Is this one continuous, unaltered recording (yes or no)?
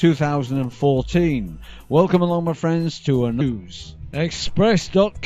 yes